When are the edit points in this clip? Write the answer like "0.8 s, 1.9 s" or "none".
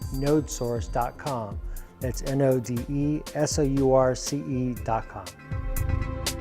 5.4 s